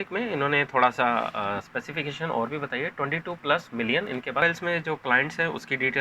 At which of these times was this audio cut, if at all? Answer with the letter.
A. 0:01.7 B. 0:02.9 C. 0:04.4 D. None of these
C